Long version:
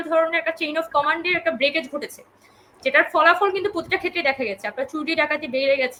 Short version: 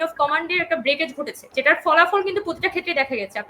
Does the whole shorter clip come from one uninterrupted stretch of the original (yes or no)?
no